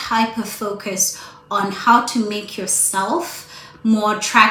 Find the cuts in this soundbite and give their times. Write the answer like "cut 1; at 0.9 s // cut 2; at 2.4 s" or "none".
none